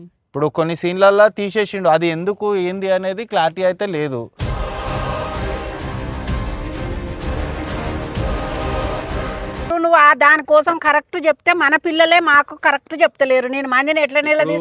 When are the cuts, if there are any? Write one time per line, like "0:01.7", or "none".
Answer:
0:09.6